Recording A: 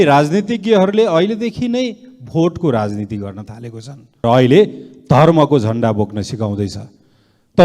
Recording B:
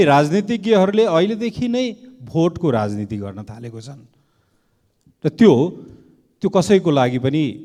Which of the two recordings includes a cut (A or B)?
A